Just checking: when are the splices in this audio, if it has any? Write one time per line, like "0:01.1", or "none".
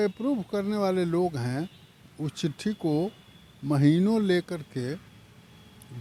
none